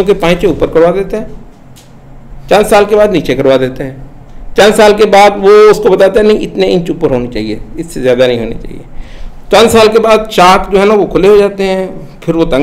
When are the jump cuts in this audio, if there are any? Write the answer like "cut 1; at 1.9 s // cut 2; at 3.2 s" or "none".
none